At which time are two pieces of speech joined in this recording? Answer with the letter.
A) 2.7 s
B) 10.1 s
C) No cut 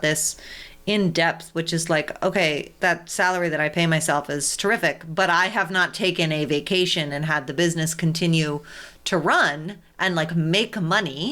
A